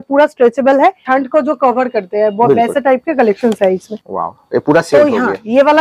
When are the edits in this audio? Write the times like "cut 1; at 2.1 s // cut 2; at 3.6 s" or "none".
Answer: cut 1; at 1.0 s // cut 2; at 4.0 s

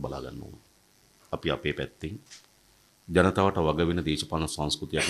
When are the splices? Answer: cut 1; at 1.1 s

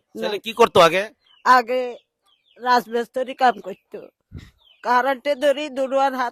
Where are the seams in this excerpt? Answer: none

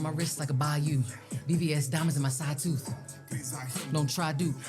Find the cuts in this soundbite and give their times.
none

